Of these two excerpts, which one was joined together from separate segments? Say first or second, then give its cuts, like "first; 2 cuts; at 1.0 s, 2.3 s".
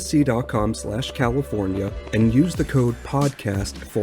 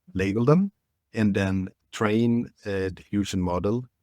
second; 1 cut; at 1.8 s